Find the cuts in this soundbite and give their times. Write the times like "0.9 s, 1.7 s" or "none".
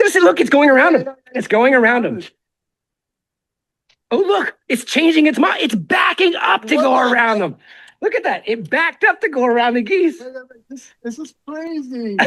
none